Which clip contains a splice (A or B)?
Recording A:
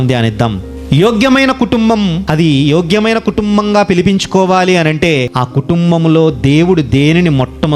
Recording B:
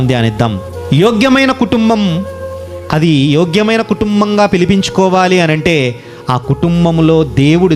A